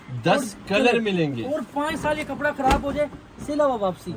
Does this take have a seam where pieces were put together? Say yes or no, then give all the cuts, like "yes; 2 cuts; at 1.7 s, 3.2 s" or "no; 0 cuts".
no; 0 cuts